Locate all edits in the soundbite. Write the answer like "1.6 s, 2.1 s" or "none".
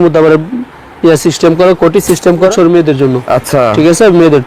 2.5 s